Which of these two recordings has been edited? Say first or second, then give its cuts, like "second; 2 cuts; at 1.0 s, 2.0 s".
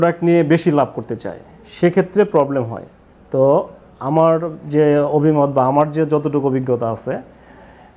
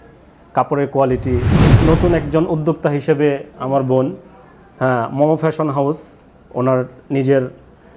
second; 1 cut; at 1.6 s